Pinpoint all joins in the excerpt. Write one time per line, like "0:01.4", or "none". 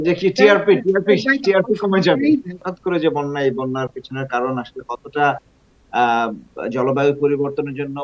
0:02.6